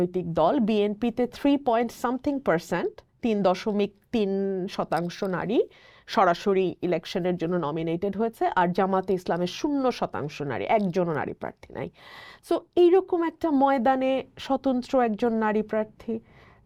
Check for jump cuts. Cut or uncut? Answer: uncut